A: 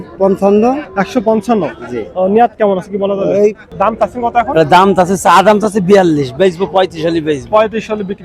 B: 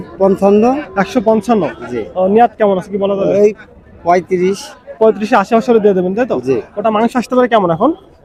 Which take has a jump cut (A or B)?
A